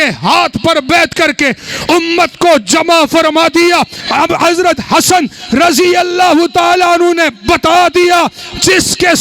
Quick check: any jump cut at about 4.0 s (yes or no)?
yes